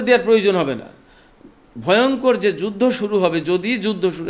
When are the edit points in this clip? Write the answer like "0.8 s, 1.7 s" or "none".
none